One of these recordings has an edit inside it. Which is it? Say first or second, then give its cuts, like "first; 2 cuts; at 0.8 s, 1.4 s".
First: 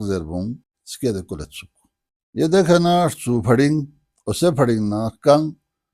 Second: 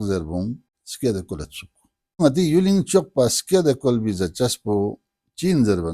second; 1 cut; at 2.2 s